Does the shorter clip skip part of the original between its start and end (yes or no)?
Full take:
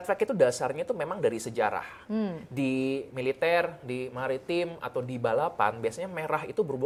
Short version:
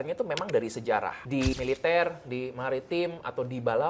yes